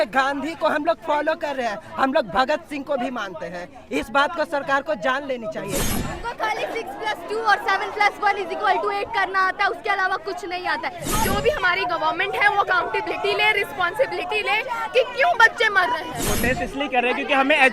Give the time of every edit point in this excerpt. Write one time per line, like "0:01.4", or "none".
0:05.8
0:11.0
0:16.2